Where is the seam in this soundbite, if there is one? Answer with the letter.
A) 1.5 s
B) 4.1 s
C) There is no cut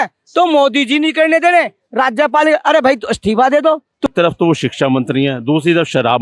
B